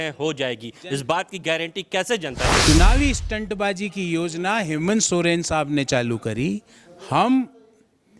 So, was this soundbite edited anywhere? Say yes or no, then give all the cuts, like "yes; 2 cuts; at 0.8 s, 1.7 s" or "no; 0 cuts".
yes; 1 cut; at 2.7 s